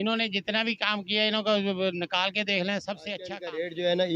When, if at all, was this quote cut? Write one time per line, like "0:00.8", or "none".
0:03.1